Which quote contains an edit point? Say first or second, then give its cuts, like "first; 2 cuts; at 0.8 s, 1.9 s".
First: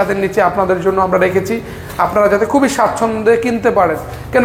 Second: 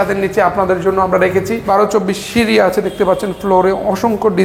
second; 1 cut; at 1.6 s